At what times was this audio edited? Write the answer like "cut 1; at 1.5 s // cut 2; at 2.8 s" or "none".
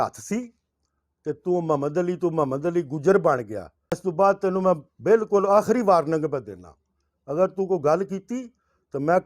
cut 1; at 4.0 s